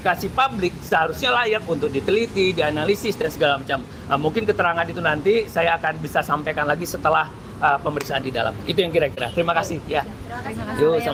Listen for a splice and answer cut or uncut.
uncut